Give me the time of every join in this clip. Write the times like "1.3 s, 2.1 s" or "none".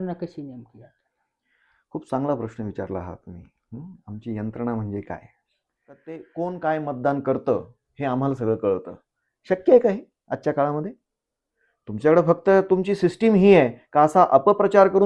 6.2 s

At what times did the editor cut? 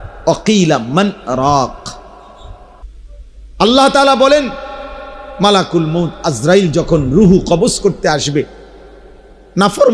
2.8 s

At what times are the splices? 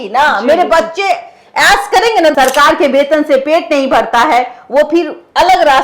2.3 s

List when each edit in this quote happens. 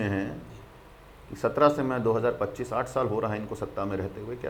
none

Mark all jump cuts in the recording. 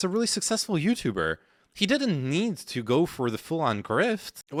none

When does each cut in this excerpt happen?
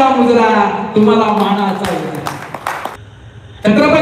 3.0 s

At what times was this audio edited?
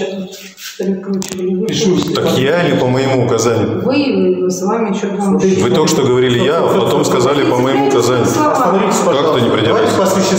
none

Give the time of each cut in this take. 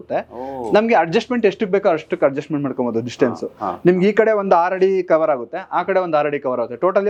none

